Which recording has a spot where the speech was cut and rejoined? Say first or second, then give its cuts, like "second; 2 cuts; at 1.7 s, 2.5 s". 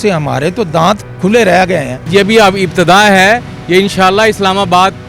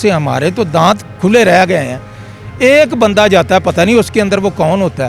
first; 1 cut; at 2.0 s